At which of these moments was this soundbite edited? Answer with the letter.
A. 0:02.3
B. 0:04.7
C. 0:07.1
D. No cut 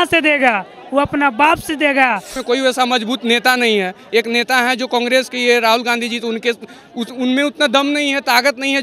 A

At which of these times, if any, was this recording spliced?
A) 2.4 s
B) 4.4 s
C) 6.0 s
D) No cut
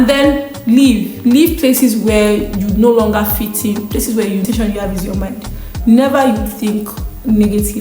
B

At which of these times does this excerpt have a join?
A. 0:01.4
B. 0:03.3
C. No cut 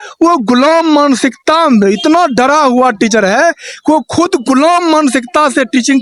C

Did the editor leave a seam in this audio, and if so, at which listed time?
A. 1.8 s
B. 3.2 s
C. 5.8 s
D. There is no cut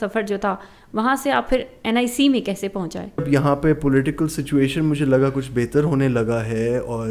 B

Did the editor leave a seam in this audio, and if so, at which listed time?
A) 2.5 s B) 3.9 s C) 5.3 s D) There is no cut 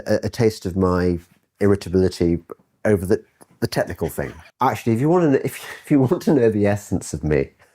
B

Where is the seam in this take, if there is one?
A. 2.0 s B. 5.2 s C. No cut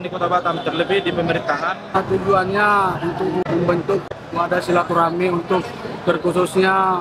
A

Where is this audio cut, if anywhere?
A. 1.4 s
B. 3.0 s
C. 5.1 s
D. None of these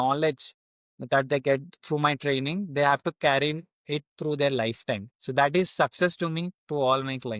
C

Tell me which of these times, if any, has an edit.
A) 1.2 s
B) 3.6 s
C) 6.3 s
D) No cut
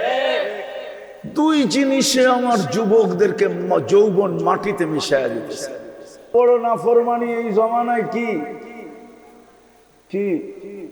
C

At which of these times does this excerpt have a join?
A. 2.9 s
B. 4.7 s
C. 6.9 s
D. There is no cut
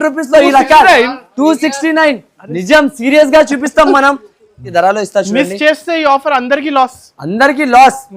B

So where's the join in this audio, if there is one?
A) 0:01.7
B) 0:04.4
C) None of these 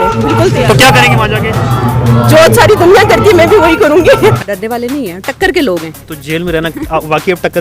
B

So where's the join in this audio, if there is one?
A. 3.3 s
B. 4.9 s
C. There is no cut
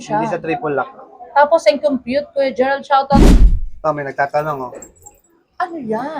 A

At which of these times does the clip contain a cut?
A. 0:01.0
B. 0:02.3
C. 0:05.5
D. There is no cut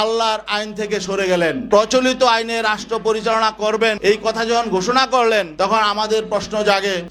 D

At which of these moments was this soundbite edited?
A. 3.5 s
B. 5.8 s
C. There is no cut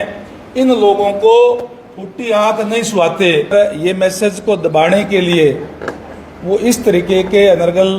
A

